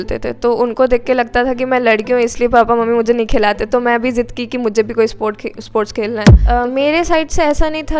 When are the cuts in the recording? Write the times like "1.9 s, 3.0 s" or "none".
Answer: 6.3 s

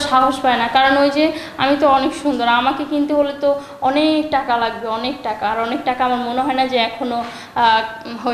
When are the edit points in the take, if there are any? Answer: none

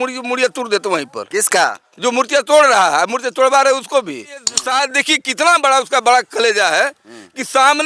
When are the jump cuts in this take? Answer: 4.6 s

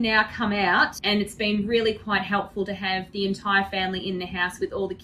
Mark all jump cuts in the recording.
1.0 s

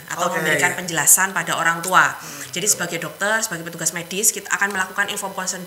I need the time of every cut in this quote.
none

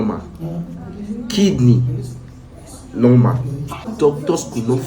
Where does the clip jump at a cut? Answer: 3.9 s

